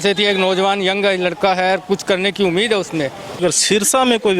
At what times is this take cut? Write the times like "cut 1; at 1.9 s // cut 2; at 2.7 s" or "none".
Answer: cut 1; at 3.4 s